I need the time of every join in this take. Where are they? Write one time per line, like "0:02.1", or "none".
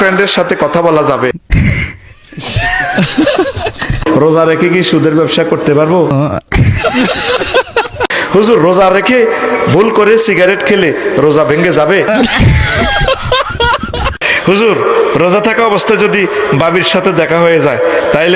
none